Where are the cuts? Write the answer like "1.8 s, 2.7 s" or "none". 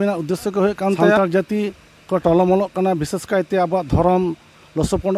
1.2 s